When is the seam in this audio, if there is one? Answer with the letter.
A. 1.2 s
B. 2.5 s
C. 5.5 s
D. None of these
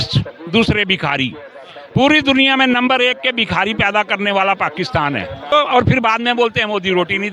C